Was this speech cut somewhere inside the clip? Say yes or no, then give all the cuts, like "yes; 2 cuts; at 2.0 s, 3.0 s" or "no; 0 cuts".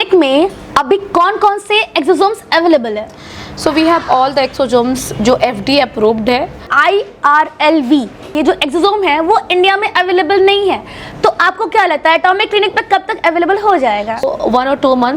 yes; 2 cuts; at 6.7 s, 14.2 s